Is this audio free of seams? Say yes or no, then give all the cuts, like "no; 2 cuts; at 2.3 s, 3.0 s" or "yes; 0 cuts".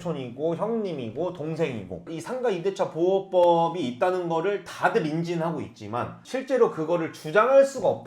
no; 1 cut; at 2.0 s